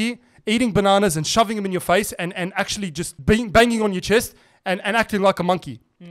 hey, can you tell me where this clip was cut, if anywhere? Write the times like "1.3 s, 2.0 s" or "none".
3.1 s